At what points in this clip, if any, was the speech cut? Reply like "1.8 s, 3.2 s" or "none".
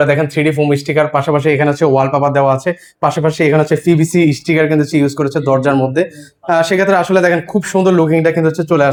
none